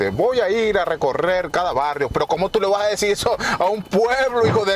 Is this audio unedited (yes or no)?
yes